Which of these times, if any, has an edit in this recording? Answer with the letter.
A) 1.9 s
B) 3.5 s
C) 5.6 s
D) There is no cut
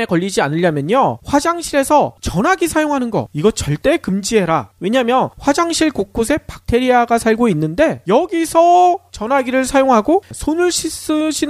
C